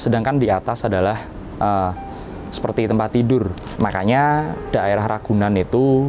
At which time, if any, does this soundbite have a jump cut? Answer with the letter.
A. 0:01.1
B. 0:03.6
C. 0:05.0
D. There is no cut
B